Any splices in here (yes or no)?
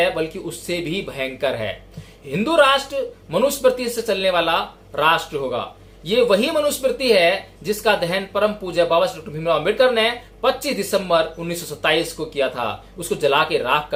no